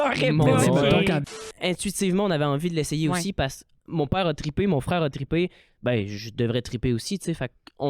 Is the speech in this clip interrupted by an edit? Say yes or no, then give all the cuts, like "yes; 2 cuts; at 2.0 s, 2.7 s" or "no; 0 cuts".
yes; 1 cut; at 1.2 s